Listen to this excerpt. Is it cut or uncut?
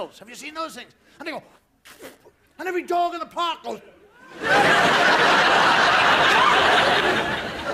uncut